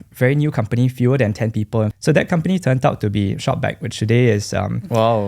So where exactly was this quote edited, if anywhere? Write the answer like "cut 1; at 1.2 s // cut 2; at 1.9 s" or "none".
cut 1; at 1.9 s